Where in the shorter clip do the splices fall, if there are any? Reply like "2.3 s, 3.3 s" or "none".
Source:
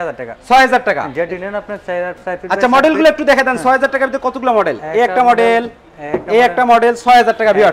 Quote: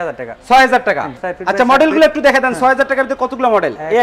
1.1 s